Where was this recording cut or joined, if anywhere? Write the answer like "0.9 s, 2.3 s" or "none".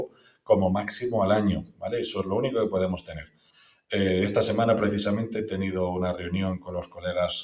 none